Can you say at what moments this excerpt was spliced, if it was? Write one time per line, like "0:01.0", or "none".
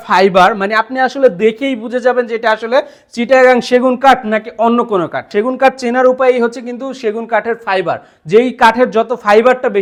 none

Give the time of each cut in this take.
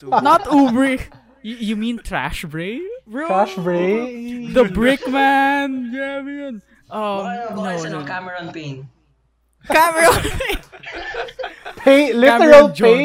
none

